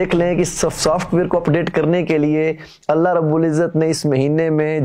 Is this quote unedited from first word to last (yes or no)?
yes